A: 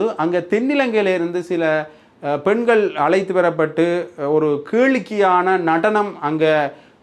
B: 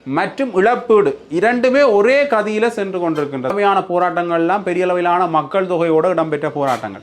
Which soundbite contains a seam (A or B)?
B